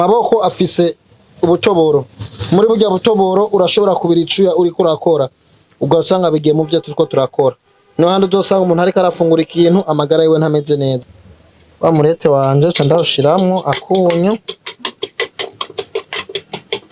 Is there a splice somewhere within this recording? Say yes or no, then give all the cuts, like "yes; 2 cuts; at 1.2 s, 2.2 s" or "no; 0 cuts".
yes; 1 cut; at 11.0 s